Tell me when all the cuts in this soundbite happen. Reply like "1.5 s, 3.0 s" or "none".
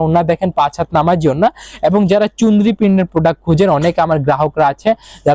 none